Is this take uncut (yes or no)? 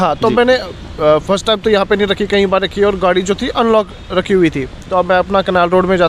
yes